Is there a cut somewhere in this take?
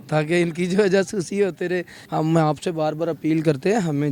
yes; 1 cut; at 2.0 s

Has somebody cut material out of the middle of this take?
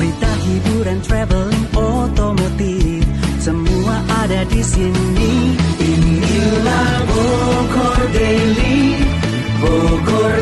no; 0 cuts

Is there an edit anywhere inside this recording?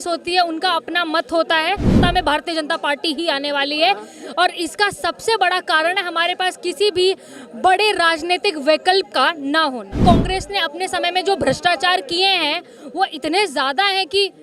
yes; 2 cuts; at 2.0 s, 10.0 s

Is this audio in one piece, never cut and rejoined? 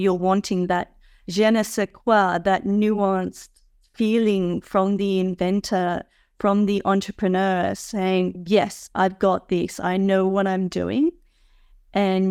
yes; 0 cuts

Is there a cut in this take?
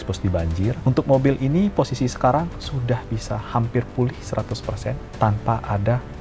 yes; 2 cuts; at 0.8 s, 5.0 s

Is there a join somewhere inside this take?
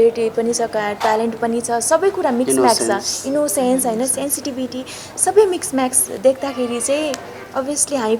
no; 0 cuts

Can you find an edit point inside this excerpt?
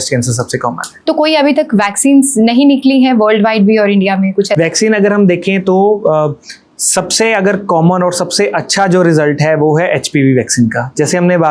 no; 0 cuts

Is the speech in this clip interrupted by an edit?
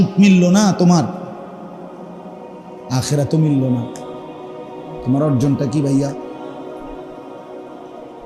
no; 0 cuts

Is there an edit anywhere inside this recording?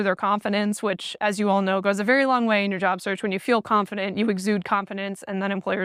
no; 0 cuts

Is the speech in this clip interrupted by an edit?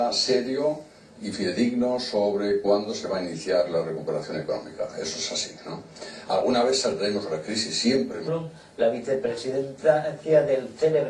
no; 0 cuts

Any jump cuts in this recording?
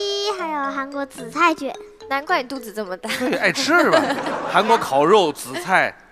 yes; 1 cut; at 3.6 s

